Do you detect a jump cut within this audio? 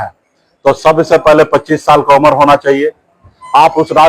no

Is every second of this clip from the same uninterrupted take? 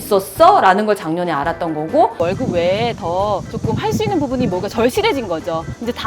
no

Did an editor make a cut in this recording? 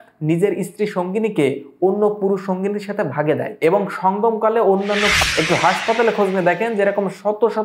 yes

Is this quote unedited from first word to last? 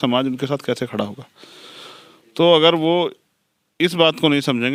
yes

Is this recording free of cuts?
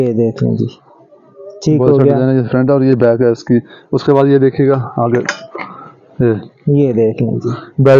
yes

